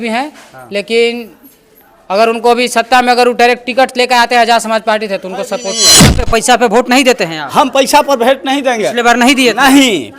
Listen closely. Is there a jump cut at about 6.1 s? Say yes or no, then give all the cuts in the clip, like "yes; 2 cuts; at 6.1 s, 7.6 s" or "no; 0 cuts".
yes; 1 cut; at 6.1 s